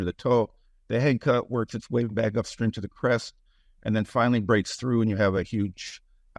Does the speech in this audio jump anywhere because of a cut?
no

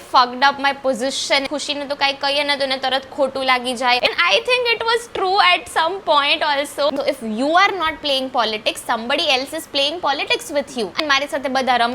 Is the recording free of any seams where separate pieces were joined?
no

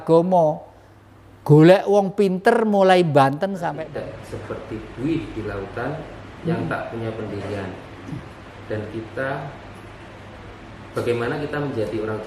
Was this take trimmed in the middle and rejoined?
yes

